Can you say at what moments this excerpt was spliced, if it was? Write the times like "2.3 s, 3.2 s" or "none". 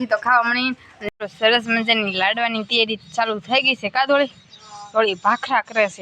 0.9 s